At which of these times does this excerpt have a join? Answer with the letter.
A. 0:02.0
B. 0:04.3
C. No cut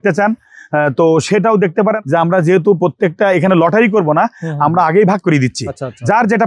A